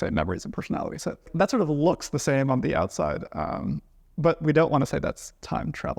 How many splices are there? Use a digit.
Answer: 1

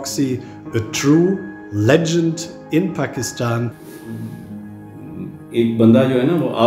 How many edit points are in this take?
1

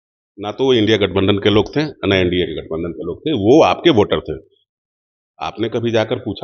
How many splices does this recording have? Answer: 0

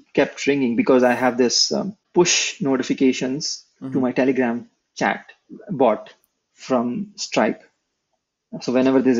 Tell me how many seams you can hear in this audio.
1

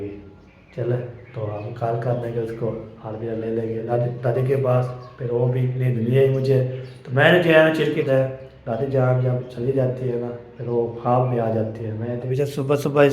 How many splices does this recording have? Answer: 3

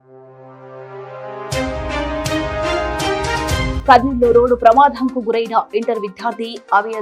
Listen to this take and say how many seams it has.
1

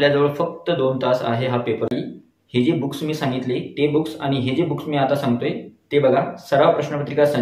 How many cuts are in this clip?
1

